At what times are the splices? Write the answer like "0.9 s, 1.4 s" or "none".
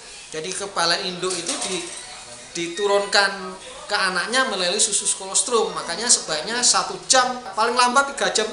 7.4 s